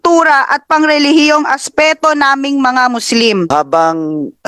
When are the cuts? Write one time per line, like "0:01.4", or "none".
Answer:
0:03.5